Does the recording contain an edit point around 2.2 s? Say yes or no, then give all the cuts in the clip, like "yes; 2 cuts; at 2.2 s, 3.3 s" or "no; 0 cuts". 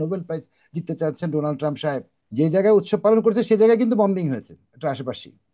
yes; 1 cut; at 2.2 s